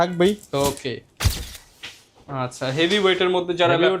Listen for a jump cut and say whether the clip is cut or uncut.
cut